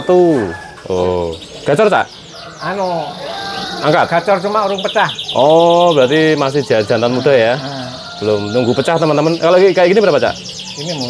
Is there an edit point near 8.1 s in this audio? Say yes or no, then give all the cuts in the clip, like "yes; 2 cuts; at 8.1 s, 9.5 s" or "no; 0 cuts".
no; 0 cuts